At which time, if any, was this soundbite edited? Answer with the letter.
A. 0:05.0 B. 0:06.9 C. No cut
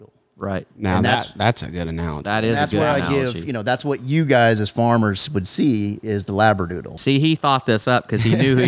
B